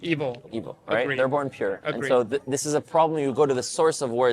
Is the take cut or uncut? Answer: uncut